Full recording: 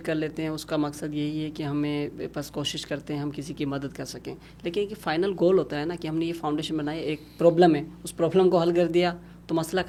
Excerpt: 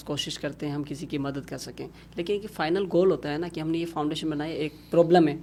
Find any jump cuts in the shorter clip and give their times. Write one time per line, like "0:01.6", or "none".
none